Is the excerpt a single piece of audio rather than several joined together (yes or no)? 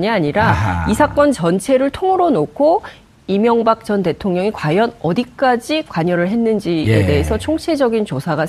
no